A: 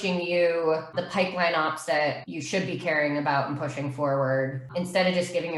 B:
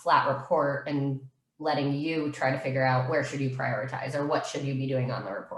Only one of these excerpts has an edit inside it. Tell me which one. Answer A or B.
A